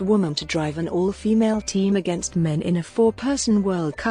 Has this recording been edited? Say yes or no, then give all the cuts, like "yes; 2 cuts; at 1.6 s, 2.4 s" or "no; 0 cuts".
no; 0 cuts